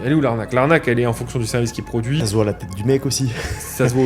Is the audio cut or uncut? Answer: cut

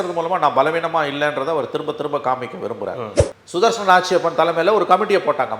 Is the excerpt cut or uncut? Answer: cut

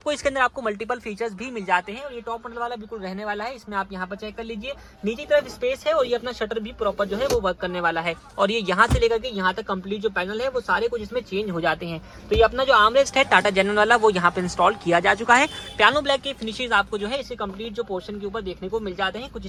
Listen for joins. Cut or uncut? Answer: uncut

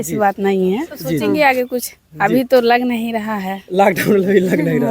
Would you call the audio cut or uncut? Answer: cut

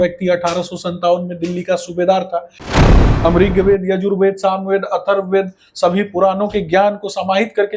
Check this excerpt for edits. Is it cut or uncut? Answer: cut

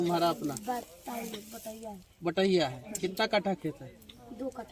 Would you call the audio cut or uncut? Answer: uncut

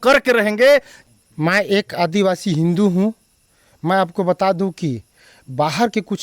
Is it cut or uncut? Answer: cut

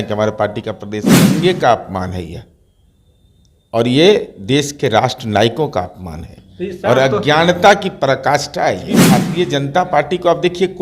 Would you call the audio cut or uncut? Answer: cut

